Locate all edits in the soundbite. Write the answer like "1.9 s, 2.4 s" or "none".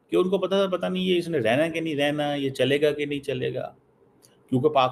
none

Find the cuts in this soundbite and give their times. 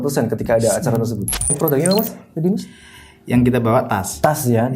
1.6 s

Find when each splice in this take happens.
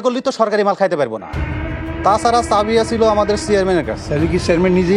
4.0 s

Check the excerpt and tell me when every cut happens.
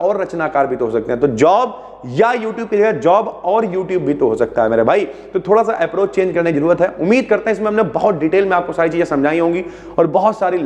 none

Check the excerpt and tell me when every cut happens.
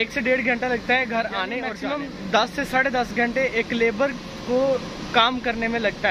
1.7 s

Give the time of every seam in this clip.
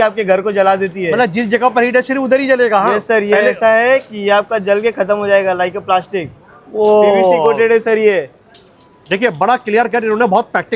none

